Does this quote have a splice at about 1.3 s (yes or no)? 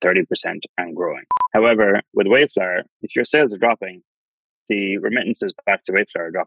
yes